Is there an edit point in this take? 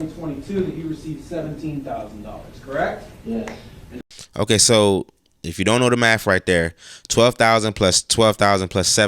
no; 0 cuts

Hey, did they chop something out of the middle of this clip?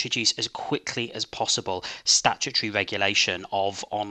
no; 0 cuts

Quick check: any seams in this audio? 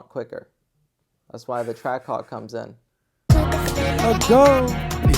yes; 1 cut; at 3.2 s

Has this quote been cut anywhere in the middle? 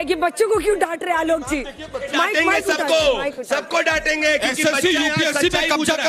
no; 0 cuts

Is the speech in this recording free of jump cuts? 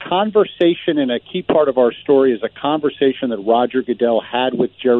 yes; 0 cuts

